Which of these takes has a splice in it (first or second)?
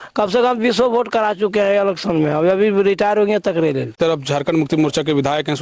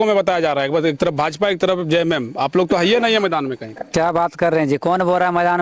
first